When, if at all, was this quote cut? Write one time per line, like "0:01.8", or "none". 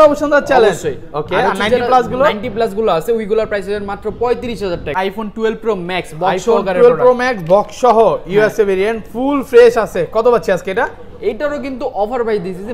0:04.9